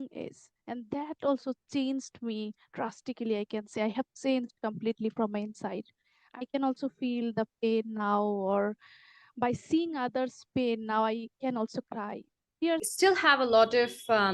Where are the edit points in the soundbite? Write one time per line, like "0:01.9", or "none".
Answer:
0:12.9